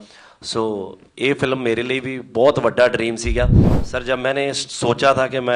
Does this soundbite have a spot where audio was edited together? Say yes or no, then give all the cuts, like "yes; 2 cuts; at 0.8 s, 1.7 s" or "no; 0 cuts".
yes; 1 cut; at 3.7 s